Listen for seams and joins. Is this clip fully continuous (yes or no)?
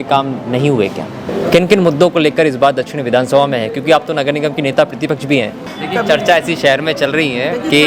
no